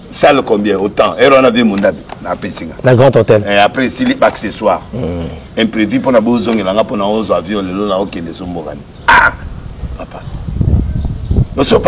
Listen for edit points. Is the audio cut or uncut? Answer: uncut